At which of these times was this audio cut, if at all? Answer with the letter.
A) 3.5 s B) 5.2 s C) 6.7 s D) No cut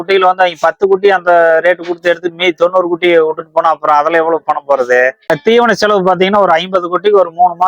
B